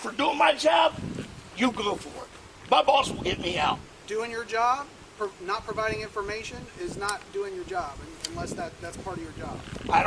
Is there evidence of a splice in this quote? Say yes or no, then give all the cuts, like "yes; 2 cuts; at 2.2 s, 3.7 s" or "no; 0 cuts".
no; 0 cuts